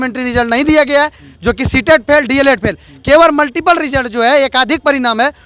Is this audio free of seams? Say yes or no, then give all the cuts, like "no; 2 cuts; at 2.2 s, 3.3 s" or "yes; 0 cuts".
yes; 0 cuts